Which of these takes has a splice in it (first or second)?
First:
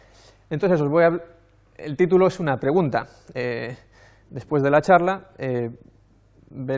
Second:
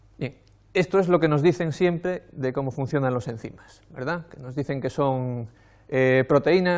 first